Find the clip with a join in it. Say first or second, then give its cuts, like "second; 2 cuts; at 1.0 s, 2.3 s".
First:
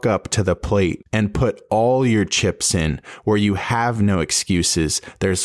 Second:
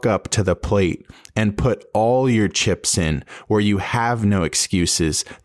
first; 1 cut; at 1.0 s